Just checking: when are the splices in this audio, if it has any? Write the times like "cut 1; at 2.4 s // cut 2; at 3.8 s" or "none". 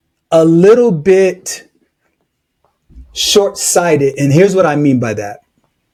none